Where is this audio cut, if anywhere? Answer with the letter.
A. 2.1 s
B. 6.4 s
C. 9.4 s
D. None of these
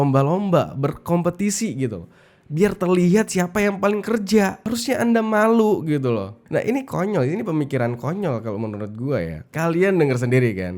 C